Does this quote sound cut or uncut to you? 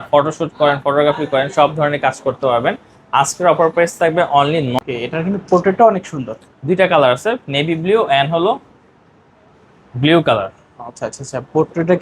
cut